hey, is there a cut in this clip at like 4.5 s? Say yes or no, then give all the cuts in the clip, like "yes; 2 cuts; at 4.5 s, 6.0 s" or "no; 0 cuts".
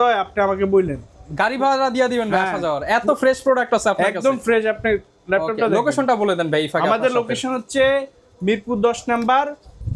no; 0 cuts